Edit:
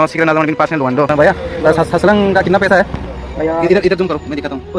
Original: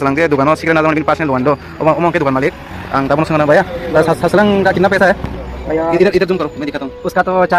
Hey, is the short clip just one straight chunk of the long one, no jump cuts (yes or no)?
no